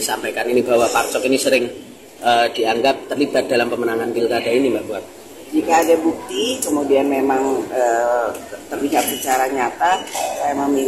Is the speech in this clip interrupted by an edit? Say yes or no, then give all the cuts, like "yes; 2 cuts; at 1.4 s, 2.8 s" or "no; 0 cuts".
no; 0 cuts